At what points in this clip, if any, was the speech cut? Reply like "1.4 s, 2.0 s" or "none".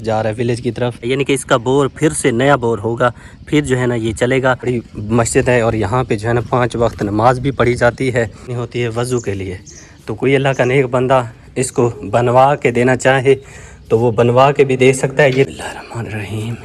1.1 s, 4.7 s, 8.6 s, 15.6 s